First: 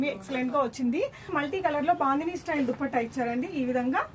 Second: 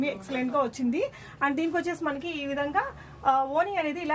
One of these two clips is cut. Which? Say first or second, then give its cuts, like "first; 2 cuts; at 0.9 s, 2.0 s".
first; 1 cut; at 1.3 s